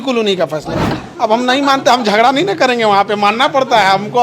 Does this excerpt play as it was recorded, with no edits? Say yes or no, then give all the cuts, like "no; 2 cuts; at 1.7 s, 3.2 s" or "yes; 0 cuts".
no; 1 cut; at 0.9 s